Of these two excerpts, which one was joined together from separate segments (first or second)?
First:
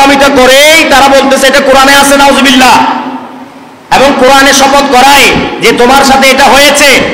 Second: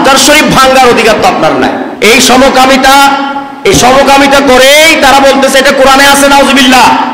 second